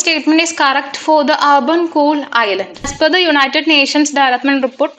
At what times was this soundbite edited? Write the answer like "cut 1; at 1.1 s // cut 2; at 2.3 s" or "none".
cut 1; at 2.9 s